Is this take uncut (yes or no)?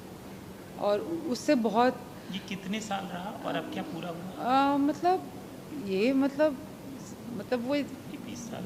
yes